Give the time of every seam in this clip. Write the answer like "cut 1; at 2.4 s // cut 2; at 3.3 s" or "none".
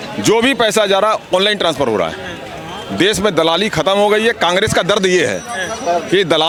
none